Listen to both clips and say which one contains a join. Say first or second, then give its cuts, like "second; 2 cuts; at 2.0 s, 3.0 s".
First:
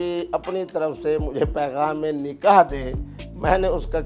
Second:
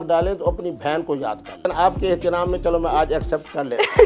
second; 1 cut; at 1.6 s